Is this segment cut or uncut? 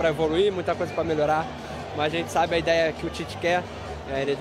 uncut